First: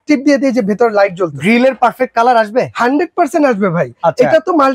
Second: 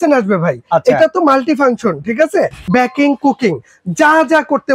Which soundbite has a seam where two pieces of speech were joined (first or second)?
second